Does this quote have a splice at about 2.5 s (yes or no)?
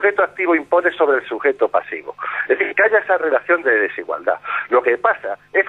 no